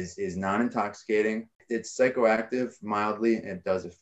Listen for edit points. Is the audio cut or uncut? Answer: cut